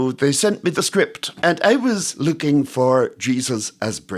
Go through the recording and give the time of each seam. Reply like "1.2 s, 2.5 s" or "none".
1.2 s